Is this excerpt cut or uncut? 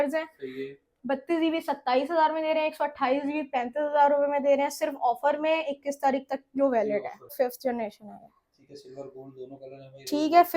cut